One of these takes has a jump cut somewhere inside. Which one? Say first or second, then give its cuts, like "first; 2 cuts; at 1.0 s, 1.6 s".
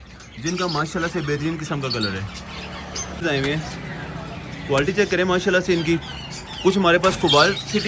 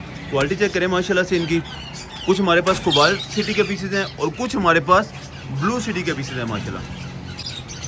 first; 1 cut; at 3.2 s